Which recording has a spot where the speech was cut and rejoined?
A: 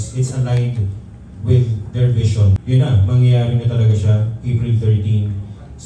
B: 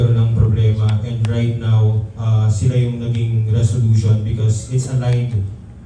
A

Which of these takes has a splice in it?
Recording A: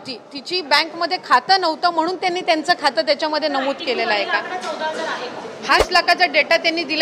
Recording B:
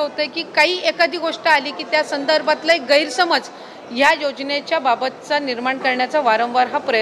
A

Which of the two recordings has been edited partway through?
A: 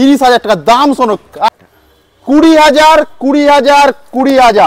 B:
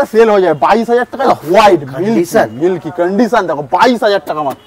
A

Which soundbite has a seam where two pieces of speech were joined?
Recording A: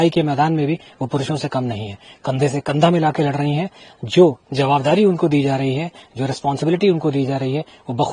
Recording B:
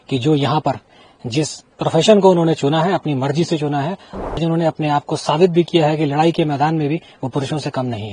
B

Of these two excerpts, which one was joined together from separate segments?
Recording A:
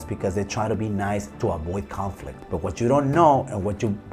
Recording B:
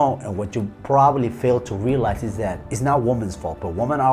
A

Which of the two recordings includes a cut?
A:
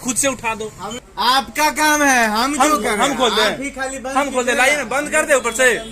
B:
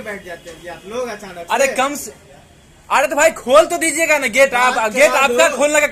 A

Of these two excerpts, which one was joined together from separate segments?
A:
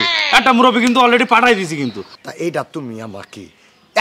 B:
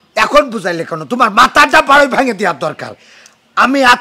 A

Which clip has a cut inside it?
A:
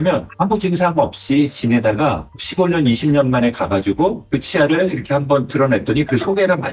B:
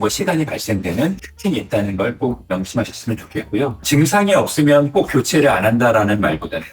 B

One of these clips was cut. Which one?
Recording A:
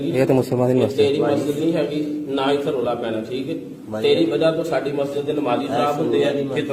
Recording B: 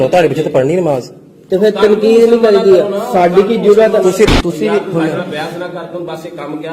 B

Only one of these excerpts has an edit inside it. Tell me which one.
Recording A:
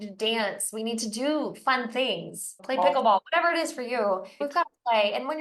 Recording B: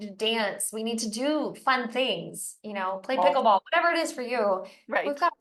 A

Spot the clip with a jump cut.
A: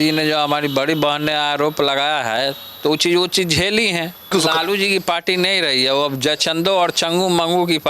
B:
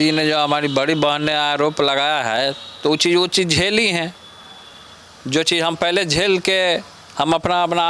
A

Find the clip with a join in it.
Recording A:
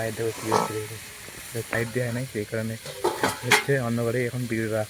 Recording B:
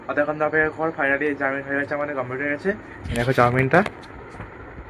A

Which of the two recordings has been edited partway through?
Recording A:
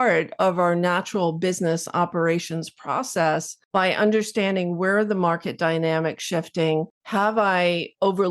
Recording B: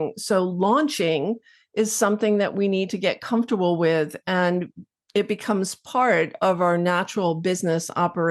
A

